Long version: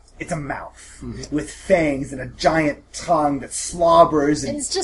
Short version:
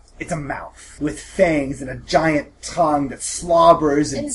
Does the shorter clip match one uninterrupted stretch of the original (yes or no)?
no